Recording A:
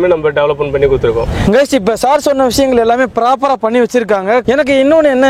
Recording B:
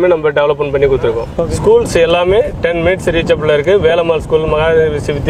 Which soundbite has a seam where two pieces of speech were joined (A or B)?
B